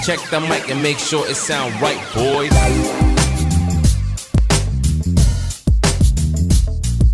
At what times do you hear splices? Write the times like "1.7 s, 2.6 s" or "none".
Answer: none